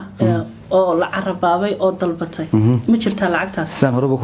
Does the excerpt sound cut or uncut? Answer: uncut